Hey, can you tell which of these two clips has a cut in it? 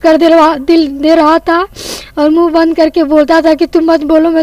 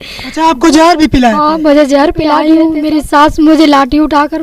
second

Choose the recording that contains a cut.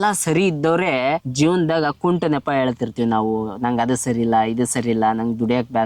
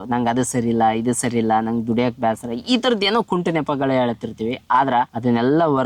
first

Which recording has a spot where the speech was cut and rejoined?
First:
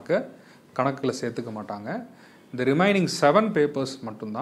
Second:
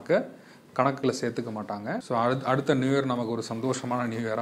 second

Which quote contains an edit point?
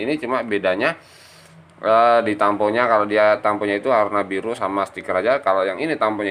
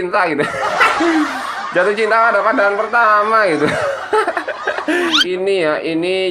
second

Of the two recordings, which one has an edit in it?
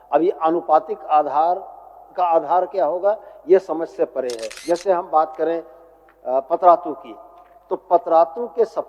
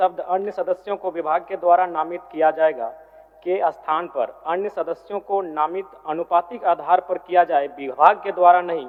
first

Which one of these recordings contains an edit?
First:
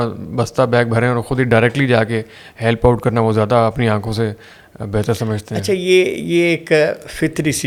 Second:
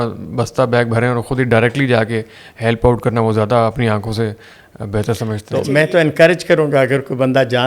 second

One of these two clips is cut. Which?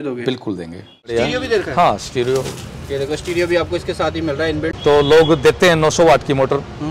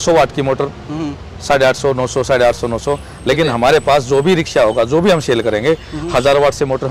first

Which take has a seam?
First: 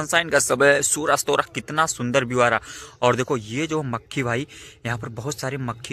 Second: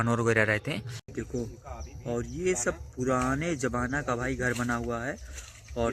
second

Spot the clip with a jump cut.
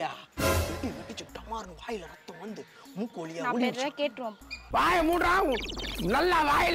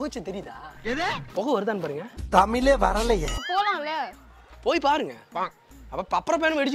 second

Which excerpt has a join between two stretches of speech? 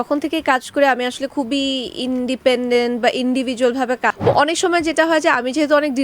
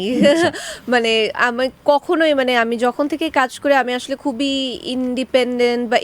first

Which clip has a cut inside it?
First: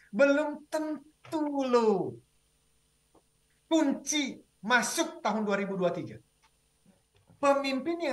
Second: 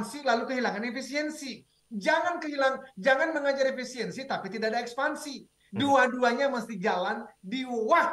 first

